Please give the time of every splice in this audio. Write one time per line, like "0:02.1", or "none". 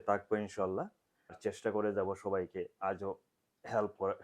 0:01.4